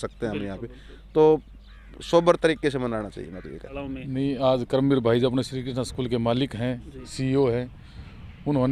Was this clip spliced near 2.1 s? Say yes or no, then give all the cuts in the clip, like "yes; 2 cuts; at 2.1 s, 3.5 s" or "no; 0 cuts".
no; 1 cut; at 3.7 s